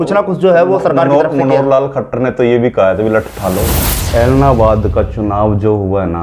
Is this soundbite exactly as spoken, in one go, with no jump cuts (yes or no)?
no